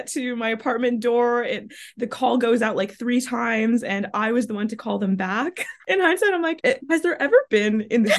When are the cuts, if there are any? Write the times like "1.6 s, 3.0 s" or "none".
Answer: 5.7 s, 6.6 s